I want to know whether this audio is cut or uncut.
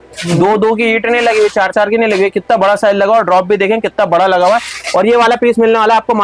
uncut